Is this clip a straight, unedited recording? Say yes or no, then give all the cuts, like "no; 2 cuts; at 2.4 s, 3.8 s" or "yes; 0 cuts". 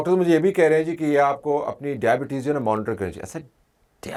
yes; 0 cuts